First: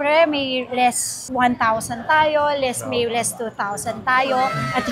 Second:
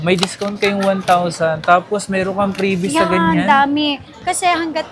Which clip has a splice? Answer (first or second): second